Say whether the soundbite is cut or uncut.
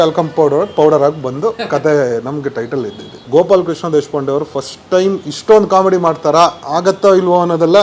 cut